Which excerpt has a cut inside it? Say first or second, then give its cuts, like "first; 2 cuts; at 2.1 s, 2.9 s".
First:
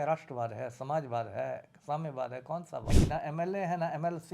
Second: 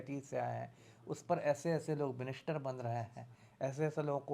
first; 1 cut; at 2.9 s